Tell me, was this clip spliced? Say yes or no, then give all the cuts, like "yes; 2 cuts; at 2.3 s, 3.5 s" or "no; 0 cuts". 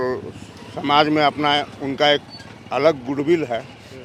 no; 0 cuts